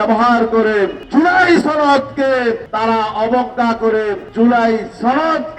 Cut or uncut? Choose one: cut